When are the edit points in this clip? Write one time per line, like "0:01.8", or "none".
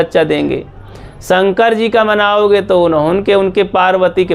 none